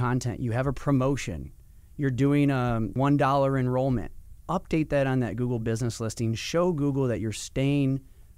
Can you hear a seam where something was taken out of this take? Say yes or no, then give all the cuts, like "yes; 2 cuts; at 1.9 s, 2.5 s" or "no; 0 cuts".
yes; 1 cut; at 2.9 s